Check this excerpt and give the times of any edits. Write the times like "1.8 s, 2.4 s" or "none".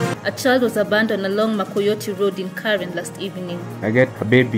3.6 s